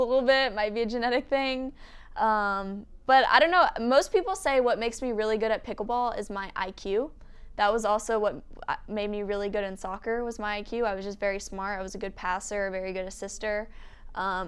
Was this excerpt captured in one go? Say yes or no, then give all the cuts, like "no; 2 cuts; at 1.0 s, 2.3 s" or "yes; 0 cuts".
yes; 0 cuts